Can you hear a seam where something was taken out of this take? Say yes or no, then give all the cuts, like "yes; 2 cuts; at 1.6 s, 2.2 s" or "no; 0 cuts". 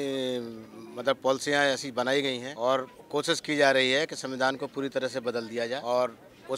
yes; 2 cuts; at 2.5 s, 5.8 s